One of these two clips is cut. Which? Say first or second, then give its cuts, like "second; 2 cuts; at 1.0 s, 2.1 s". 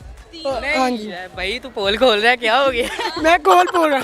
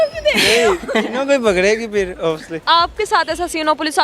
second; 1 cut; at 2.5 s